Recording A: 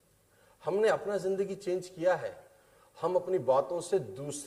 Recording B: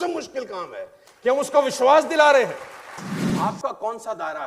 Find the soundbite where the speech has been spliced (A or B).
B